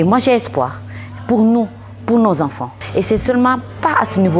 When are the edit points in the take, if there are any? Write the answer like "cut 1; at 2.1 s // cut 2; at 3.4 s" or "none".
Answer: cut 1; at 2.8 s